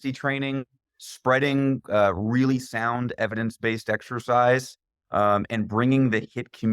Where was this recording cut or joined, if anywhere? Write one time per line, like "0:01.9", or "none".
none